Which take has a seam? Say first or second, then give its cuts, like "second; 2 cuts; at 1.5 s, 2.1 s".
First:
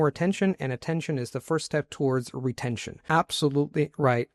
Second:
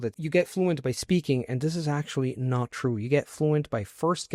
first; 1 cut; at 2.9 s